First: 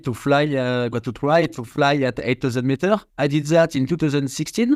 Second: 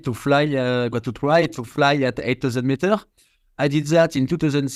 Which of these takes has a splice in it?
first; 1 cut; at 3.1 s

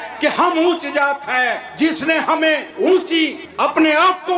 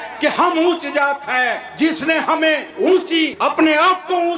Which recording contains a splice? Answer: second; 1 cut; at 3.3 s

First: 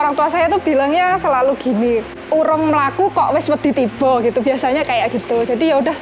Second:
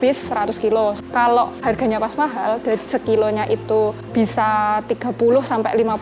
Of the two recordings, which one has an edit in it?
second; 1 cut; at 1.0 s

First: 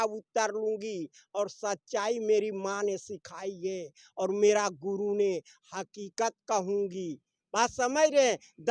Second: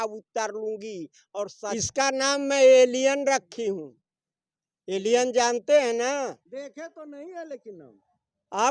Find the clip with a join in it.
second; 1 cut; at 1.7 s

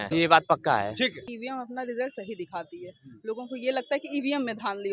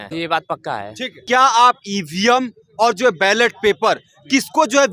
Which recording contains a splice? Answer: first; 1 cut; at 1.2 s

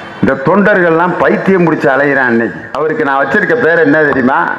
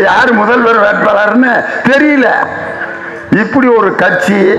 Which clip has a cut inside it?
first; 1 cut; at 2.8 s

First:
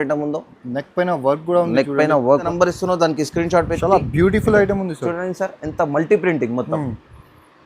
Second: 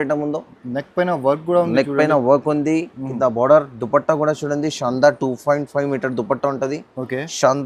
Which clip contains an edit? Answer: first; 1 cut; at 2.5 s

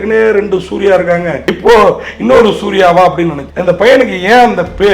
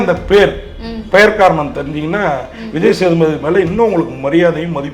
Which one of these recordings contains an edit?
first; 2 cuts; at 1.5 s, 3.4 s

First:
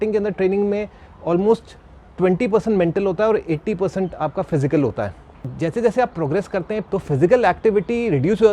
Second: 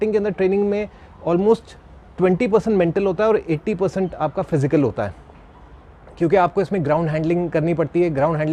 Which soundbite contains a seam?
first; 2 cuts; at 5.5 s, 6.8 s

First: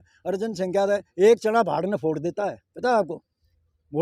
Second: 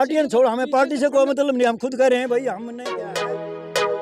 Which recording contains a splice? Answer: second; 1 cut; at 2.7 s

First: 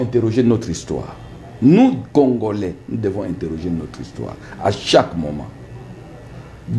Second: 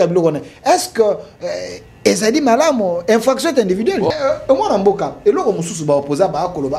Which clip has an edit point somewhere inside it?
second; 1 cut; at 4.1 s

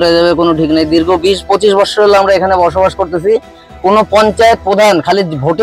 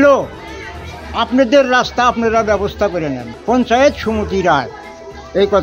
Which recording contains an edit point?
second; 1 cut; at 3.2 s

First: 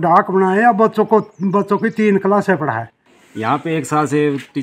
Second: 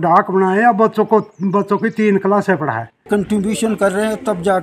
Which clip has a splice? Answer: second; 1 cut; at 3.0 s

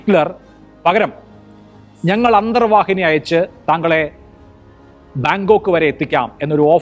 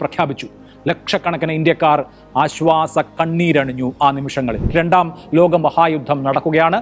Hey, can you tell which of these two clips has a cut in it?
second; 1 cut; at 4.6 s

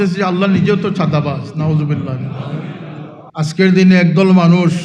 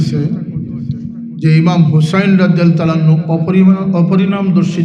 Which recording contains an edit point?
first; 1 cut; at 3.2 s

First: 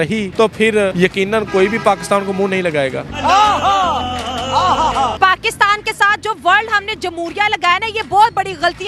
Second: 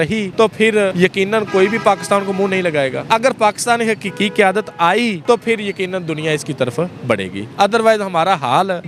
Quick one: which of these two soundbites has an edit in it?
first; 2 cuts; at 3.0 s, 5.1 s

